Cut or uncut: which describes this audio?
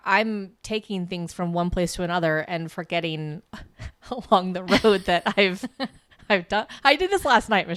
uncut